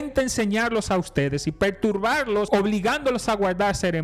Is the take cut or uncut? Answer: cut